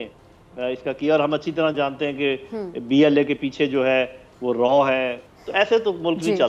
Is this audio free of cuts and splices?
no; 1 cut; at 5.3 s

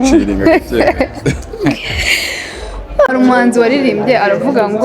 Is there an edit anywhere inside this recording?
yes; 1 cut; at 3.1 s

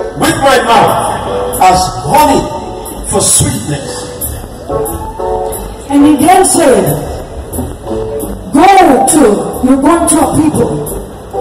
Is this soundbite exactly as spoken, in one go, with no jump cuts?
yes; 0 cuts

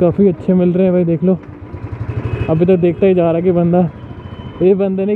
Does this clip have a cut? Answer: no; 0 cuts

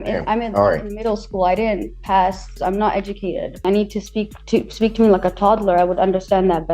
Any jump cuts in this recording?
yes; 2 cuts; at 2.6 s, 3.6 s

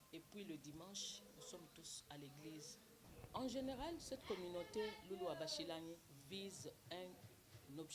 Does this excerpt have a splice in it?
yes; 1 cut; at 3.0 s

